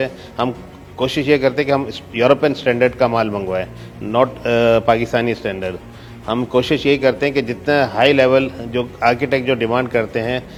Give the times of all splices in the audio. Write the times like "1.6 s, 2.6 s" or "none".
none